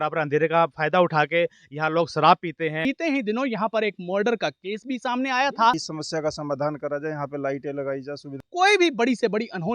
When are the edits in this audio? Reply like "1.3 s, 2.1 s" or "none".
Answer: 2.8 s, 5.8 s, 8.4 s